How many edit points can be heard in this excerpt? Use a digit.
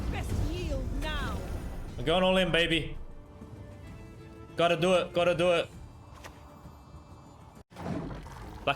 1